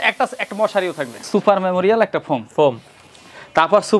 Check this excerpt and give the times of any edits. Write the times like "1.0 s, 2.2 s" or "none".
1.2 s